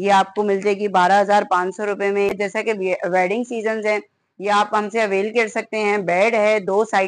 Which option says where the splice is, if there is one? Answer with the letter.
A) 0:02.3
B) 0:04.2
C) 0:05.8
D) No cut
A